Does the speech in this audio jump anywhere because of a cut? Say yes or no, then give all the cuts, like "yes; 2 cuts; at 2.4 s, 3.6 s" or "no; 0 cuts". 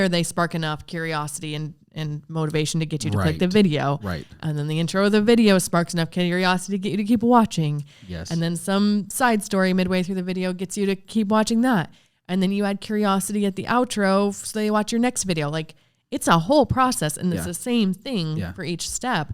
no; 0 cuts